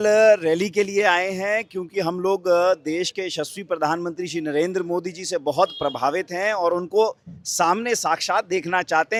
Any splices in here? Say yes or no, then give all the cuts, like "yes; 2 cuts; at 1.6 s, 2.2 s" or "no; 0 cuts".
no; 0 cuts